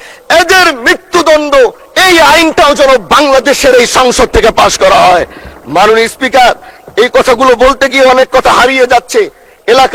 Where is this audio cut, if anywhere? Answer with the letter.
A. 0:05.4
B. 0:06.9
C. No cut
C